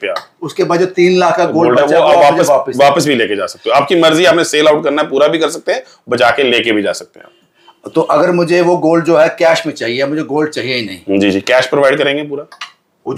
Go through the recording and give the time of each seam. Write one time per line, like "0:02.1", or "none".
none